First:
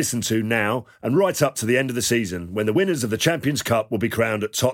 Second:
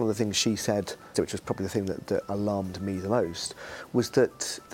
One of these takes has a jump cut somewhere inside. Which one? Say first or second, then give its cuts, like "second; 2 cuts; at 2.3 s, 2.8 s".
second; 1 cut; at 1.1 s